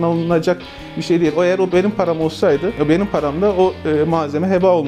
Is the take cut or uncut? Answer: uncut